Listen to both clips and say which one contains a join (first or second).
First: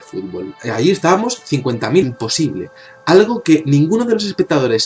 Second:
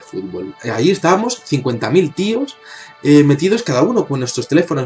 second